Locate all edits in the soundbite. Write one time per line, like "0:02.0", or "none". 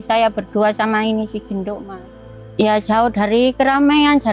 0:02.2